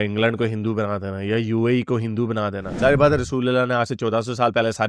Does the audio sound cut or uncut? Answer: cut